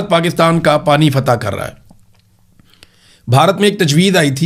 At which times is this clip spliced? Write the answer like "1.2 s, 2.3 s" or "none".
none